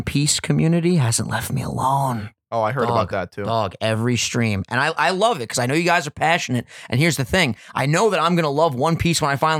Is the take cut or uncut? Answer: uncut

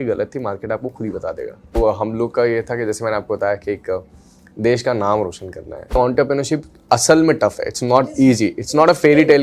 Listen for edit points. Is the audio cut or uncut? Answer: cut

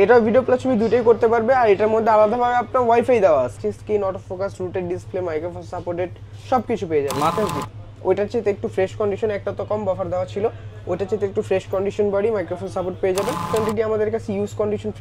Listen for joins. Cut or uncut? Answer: cut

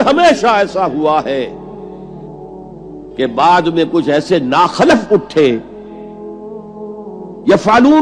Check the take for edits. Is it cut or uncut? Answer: cut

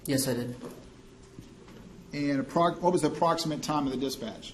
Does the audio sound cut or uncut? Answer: uncut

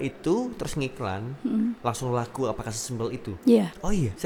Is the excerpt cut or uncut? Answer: uncut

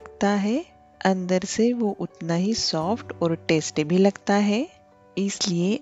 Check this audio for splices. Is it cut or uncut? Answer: uncut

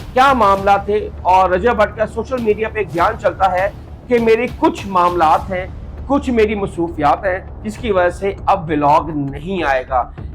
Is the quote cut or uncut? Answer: uncut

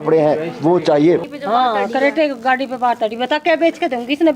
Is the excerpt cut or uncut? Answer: cut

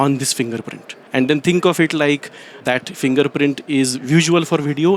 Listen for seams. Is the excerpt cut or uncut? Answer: cut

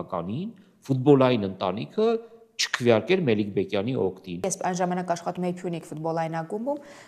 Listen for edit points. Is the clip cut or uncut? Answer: cut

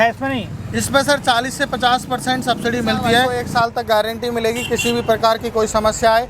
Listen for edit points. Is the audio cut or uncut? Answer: cut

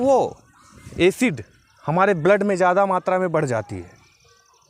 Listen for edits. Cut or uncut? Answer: uncut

